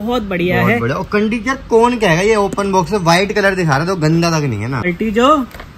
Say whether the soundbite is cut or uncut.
cut